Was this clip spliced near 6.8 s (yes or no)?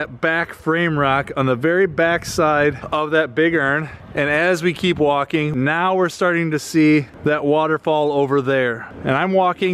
no